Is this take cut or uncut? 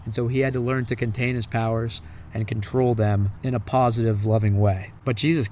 cut